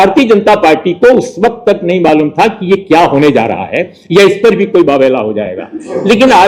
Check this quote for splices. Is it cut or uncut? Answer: uncut